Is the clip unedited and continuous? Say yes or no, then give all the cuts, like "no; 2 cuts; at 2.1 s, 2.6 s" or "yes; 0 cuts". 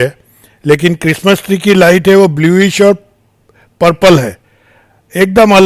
yes; 0 cuts